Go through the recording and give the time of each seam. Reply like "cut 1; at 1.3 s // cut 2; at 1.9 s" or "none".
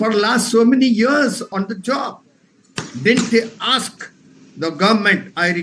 cut 1; at 1.5 s